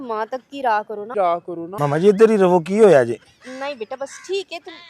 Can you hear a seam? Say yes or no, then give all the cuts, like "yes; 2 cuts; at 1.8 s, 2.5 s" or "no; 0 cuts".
yes; 1 cut; at 1.2 s